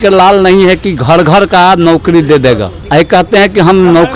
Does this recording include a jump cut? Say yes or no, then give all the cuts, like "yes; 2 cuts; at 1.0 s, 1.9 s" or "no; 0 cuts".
yes; 1 cut; at 2.7 s